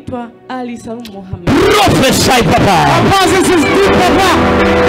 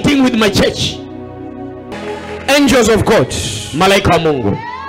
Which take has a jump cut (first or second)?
second